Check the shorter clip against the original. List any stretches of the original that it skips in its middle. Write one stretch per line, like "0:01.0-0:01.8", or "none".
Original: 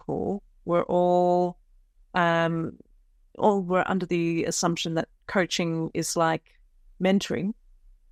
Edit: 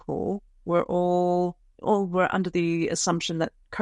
0:01.7-0:03.2